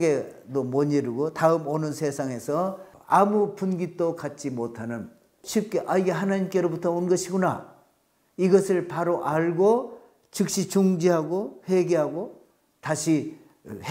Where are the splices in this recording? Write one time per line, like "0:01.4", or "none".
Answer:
0:02.9
0:05.4